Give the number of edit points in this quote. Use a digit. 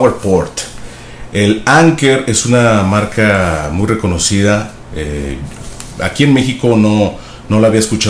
0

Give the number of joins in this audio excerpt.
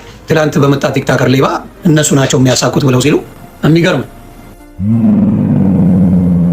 2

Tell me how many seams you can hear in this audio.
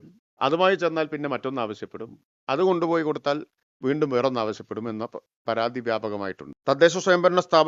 1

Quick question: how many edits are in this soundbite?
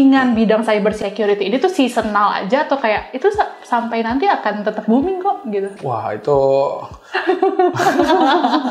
1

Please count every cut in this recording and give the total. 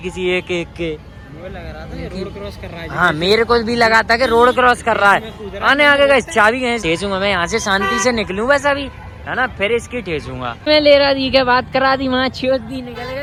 0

